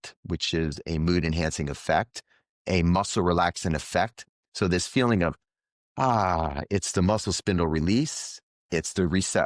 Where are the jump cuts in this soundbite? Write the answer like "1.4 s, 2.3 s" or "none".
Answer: 4.3 s